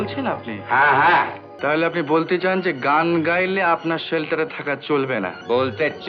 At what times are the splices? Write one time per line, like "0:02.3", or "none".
0:01.4